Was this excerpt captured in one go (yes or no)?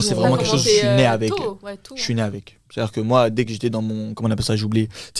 yes